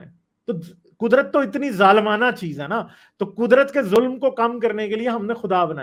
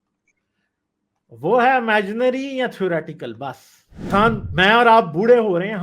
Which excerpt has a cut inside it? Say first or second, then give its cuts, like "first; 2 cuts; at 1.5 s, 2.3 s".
second; 1 cut; at 4.1 s